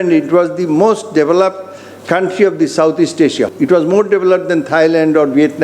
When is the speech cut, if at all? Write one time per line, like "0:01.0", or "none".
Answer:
0:03.5